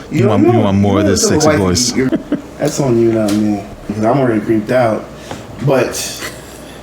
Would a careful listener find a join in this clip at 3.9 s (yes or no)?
yes